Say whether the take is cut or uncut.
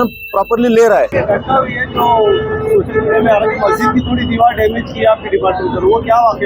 uncut